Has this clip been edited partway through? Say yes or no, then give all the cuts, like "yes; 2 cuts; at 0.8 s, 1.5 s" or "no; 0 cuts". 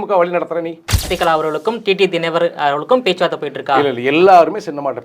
yes; 1 cut; at 1.1 s